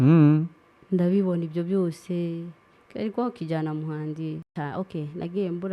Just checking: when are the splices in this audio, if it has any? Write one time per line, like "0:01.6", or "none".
0:04.5